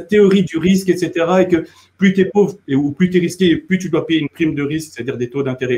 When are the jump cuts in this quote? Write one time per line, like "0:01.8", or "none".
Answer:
none